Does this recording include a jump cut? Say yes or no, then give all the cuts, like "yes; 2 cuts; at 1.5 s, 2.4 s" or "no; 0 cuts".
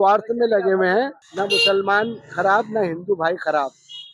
yes; 1 cut; at 1.2 s